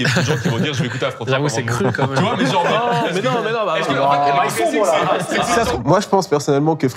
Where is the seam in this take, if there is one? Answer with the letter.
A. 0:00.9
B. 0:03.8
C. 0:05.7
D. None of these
C